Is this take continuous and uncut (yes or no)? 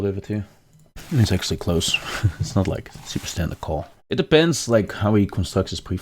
no